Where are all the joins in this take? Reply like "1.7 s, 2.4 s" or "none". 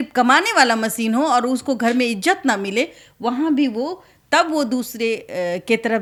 none